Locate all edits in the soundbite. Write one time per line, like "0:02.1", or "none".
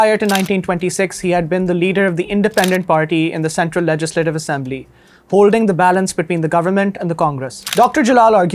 0:07.5